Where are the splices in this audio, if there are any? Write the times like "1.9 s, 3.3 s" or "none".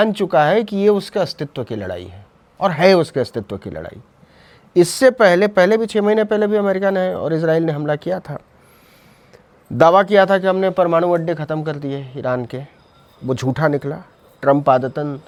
none